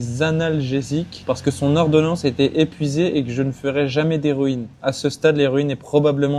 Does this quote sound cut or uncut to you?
uncut